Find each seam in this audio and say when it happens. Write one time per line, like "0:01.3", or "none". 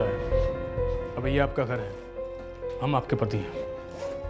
none